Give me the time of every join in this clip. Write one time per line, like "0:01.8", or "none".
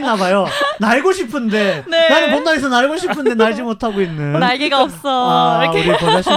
none